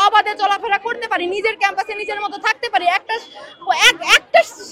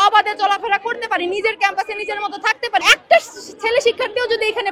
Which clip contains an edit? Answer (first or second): second